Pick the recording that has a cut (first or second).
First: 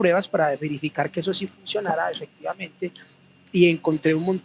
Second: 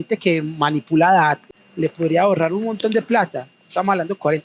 second